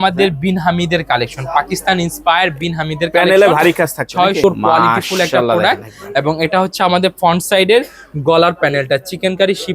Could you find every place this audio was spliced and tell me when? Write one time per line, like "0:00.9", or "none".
0:04.4

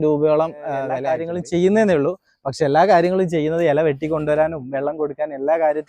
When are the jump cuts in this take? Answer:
0:01.0

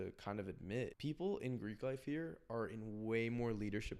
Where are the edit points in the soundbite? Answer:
0:00.9

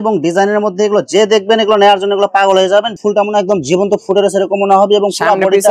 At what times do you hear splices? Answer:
0:02.9

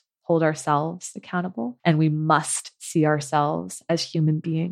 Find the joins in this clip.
0:01.7

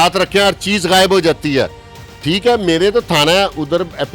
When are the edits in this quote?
none

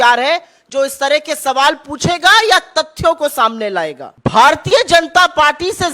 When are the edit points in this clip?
0:04.0

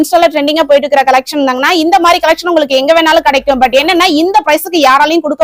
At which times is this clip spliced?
none

